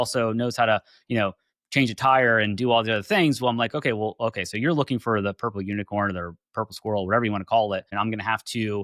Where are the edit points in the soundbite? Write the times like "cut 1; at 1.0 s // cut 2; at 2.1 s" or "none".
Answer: cut 1; at 7.9 s